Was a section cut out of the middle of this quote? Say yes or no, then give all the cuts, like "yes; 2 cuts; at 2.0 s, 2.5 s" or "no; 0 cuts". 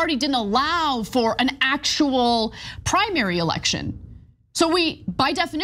yes; 1 cut; at 3.5 s